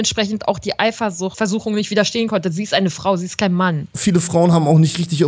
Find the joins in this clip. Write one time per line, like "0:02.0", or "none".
0:01.3
0:03.9